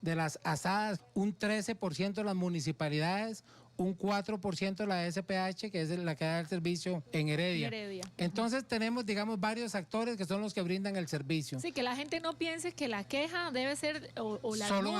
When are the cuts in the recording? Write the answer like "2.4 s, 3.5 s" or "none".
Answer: 1.0 s, 7.0 s